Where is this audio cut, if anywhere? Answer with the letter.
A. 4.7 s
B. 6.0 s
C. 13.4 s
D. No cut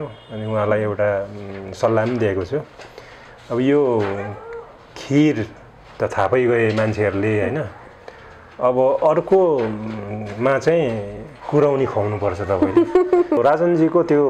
C